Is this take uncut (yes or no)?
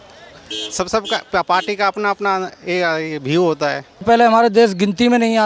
no